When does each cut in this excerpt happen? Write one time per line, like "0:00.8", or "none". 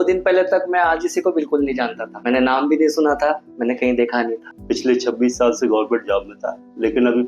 0:02.1
0:04.5